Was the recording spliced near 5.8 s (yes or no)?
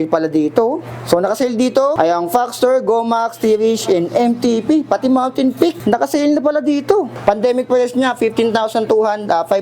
yes